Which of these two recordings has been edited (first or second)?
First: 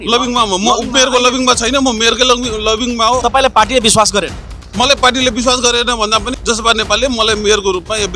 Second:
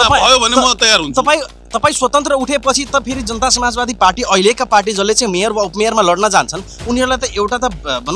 first